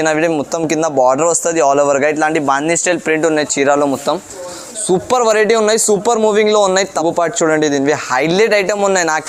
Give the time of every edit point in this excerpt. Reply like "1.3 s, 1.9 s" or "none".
7.0 s